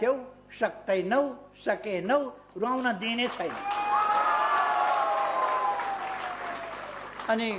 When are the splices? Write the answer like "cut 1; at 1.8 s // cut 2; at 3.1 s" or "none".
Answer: none